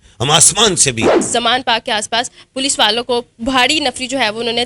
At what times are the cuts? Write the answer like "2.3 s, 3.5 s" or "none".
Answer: 1.2 s